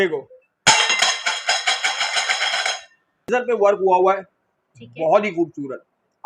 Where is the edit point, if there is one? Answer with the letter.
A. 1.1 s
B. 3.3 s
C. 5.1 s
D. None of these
B